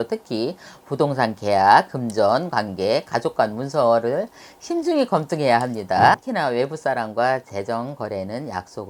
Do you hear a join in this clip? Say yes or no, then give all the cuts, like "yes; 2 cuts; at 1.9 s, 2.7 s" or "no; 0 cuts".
yes; 1 cut; at 6.1 s